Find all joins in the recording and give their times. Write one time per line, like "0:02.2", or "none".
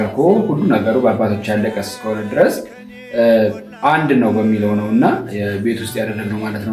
none